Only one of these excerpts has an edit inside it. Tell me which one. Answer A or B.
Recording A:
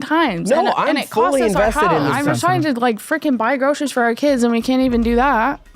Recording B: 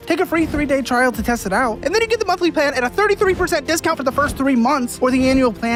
A